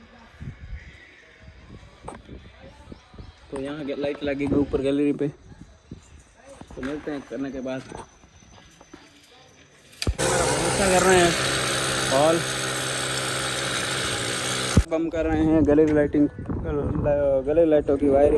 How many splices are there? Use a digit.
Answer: 0